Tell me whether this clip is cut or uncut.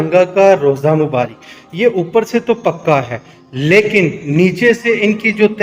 uncut